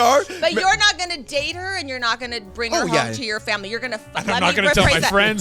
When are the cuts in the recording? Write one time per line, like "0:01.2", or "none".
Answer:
none

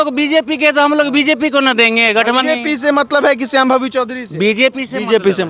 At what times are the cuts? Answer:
0:02.4

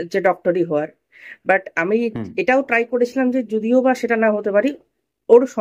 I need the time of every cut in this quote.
none

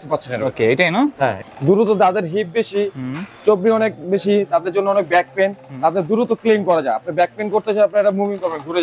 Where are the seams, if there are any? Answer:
0:01.4

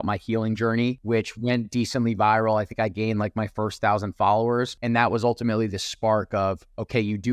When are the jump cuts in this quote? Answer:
0:01.0
0:04.8

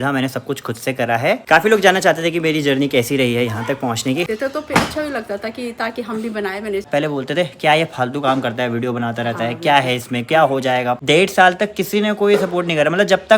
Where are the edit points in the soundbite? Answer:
0:01.4
0:04.3
0:06.9
0:11.0

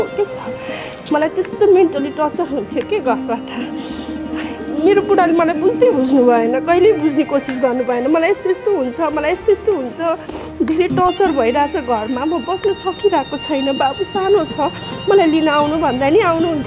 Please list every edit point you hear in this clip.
none

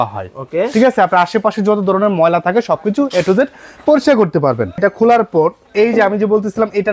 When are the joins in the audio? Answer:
0:04.7

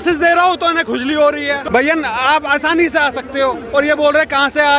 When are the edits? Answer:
0:01.6

